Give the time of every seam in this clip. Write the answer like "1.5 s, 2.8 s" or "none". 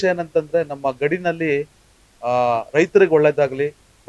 none